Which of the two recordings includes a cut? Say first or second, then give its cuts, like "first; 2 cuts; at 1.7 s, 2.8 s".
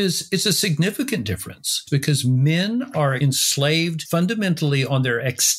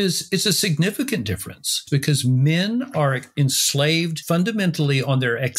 first; 1 cut; at 3.2 s